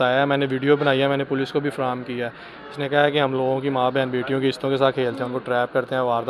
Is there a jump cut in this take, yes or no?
no